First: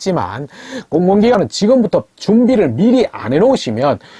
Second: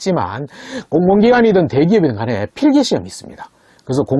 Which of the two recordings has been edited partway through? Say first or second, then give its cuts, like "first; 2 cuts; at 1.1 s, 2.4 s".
first; 1 cut; at 1.3 s